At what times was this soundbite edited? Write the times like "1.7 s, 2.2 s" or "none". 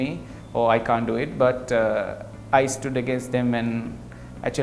none

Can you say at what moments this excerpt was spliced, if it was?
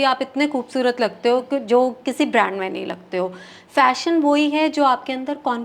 none

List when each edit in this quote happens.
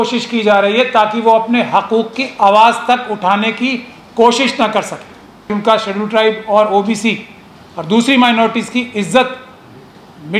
5.5 s

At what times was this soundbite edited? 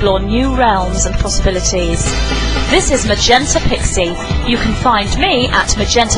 3.6 s

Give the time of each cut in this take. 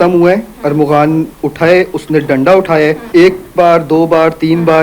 3.0 s

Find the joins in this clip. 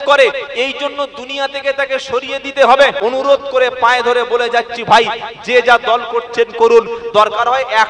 3.0 s

